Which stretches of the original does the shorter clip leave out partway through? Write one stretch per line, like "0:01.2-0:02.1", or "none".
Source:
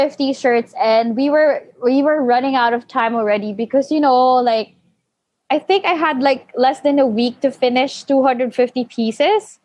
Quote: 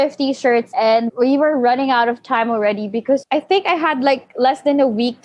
0:00.8-0:01.5
0:03.9-0:05.4